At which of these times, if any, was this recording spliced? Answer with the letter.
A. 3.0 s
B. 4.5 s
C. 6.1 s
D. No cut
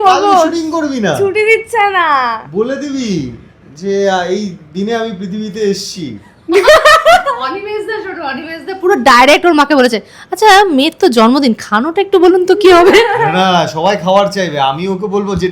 D